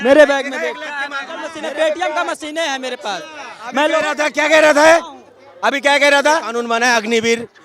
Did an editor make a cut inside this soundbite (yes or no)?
yes